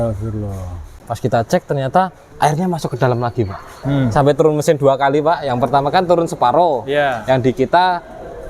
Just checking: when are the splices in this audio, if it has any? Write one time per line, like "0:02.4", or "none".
0:01.0
0:02.2
0:03.8